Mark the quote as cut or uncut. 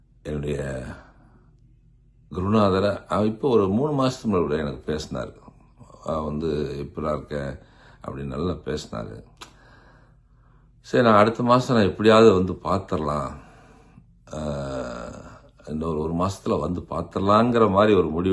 uncut